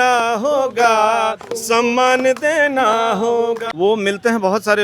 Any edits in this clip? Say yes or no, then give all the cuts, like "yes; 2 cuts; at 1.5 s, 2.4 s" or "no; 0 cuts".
yes; 1 cut; at 3.7 s